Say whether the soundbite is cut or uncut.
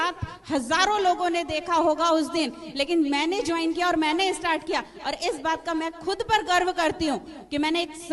uncut